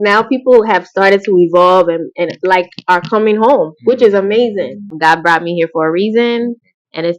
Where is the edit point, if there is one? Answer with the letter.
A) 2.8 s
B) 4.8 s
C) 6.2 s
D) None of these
B